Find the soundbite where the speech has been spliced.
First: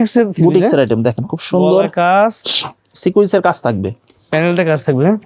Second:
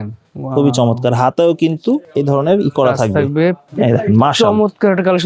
second; 2 cuts; at 2.1 s, 3.6 s

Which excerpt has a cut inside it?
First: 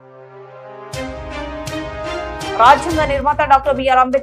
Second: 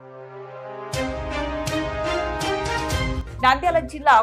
first; 1 cut; at 2.5 s

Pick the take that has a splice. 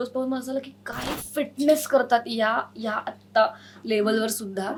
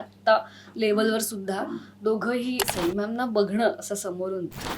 second; 1 cut; at 2.6 s

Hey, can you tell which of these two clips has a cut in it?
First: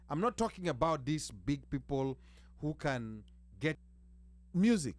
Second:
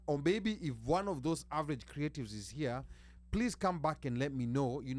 first; 1 cut; at 3.8 s

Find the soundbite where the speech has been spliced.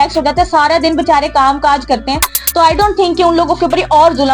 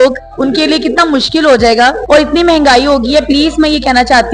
second; 1 cut; at 2.0 s

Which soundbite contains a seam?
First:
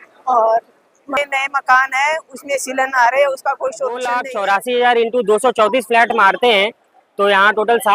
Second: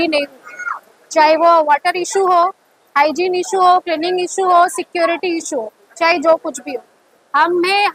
first; 1 cut; at 4.2 s

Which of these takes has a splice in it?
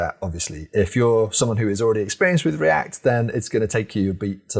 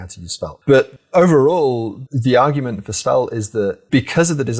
second; 3 cuts; at 0.9 s, 1.9 s, 3.8 s

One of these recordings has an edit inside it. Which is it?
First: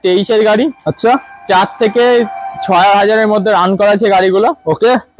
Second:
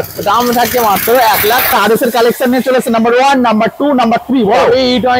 second; 1 cut; at 1.7 s

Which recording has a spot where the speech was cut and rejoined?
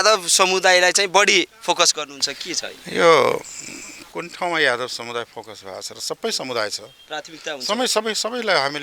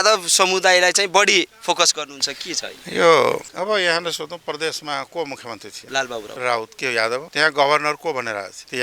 second; 1 cut; at 3.5 s

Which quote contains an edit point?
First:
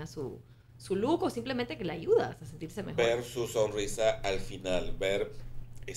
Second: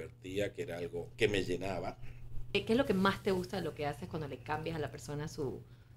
second; 2 cuts; at 1.1 s, 2.6 s

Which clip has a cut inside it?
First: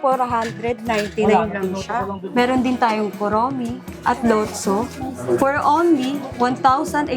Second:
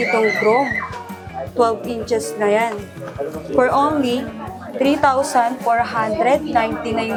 first; 4 cuts; at 2.2 s, 3.9 s, 5.2 s, 6.2 s

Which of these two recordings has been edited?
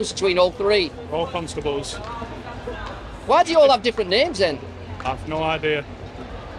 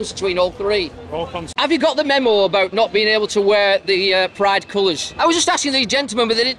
second; 2 cuts; at 1.4 s, 5.1 s

